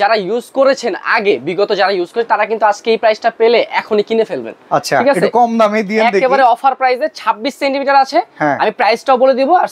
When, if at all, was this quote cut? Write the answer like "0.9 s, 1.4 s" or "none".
none